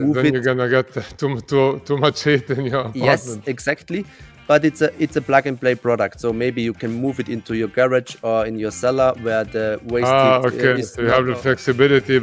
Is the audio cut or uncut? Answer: uncut